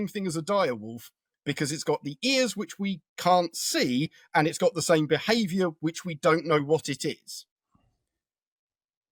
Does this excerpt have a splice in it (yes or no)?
no